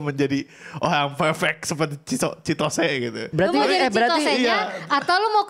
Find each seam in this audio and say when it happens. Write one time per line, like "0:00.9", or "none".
0:03.3